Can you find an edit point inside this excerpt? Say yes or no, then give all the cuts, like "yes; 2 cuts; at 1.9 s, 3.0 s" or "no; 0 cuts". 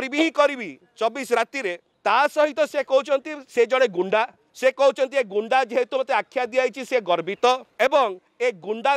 yes; 3 cuts; at 1.9 s, 4.4 s, 7.7 s